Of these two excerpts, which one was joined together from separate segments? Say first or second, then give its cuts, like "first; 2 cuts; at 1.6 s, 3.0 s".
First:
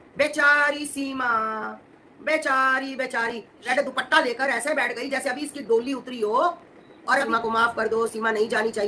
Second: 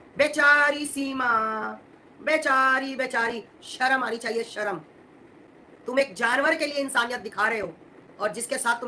first; 2 cuts; at 3.6 s, 7.3 s